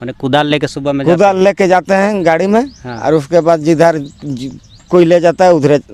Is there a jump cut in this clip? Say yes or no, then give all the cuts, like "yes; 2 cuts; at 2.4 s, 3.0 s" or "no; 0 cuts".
no; 0 cuts